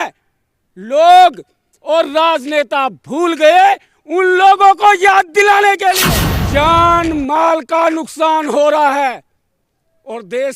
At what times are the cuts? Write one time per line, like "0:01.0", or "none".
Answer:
0:06.0